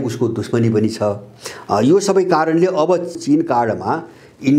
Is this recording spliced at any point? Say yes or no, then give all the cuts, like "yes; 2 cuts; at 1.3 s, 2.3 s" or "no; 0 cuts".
yes; 1 cut; at 3.2 s